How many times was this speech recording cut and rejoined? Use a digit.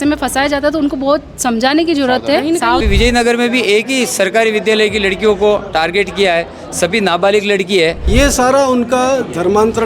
2